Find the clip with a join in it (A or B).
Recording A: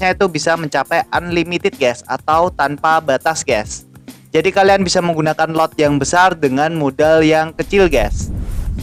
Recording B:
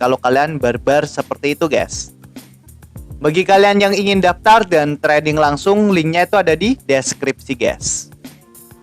B